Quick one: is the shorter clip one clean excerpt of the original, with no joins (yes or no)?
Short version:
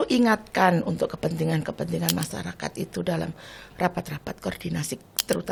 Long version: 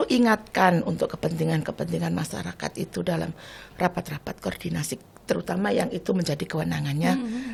yes